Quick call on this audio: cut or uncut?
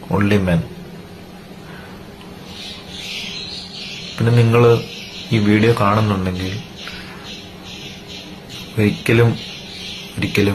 uncut